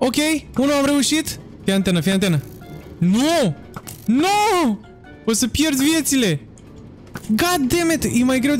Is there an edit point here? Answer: no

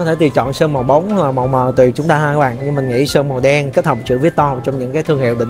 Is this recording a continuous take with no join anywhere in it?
yes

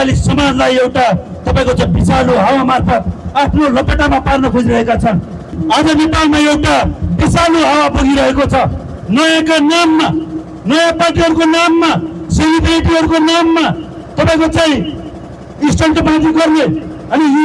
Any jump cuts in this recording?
yes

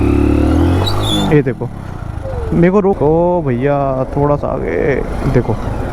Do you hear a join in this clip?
yes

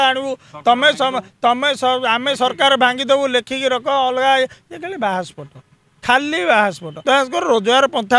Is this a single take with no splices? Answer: no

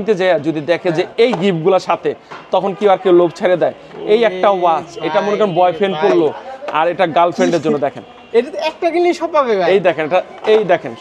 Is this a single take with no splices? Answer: yes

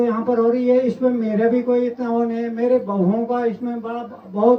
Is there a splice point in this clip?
no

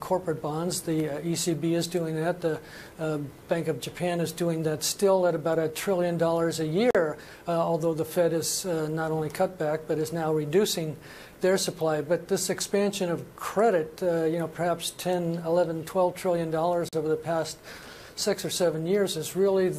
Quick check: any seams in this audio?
no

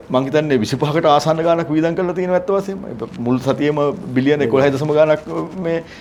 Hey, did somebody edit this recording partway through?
no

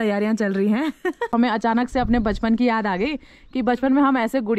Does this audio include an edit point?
yes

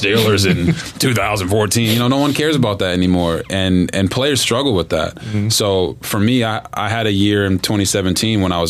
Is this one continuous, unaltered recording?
yes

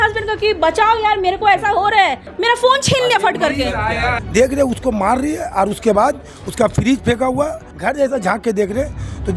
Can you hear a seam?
yes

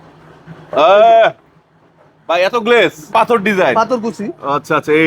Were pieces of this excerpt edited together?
yes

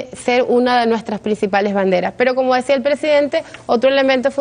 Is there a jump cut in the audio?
no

